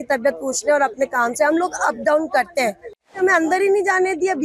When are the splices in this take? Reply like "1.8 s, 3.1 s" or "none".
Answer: 3.2 s